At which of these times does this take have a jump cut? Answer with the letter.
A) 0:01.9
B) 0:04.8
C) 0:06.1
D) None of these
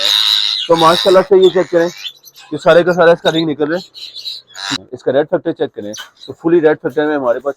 B